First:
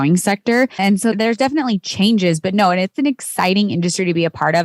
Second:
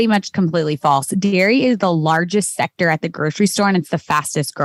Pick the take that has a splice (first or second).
first